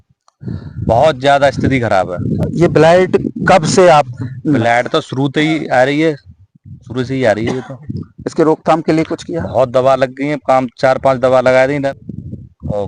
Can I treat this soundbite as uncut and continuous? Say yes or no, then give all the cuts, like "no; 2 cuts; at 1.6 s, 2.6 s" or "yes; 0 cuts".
yes; 0 cuts